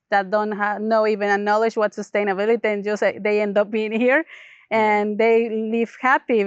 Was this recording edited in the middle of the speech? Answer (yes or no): no